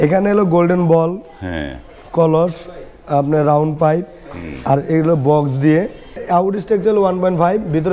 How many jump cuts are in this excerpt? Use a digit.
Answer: 1